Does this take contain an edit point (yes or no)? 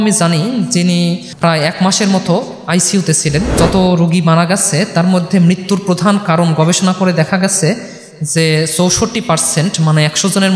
yes